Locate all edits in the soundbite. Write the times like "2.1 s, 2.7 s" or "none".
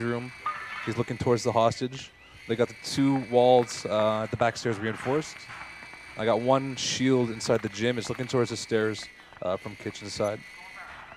none

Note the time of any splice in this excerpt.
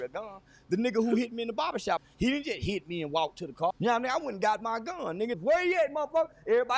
2.0 s, 3.7 s, 5.4 s

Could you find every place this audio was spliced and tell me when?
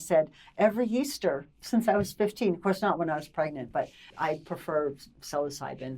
4.0 s

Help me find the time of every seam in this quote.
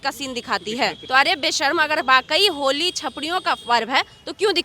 1.0 s

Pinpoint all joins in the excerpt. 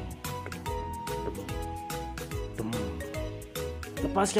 none

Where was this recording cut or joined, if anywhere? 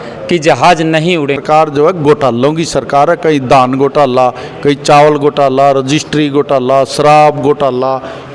1.4 s

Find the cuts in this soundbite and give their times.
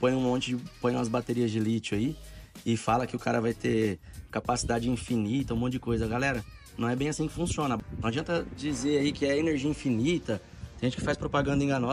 7.8 s

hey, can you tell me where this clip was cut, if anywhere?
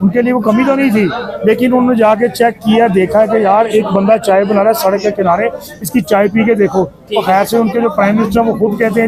none

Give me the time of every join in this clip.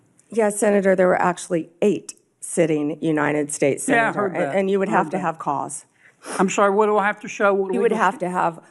none

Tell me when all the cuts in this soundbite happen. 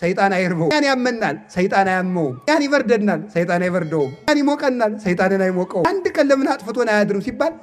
0.7 s, 2.5 s, 4.3 s, 5.8 s

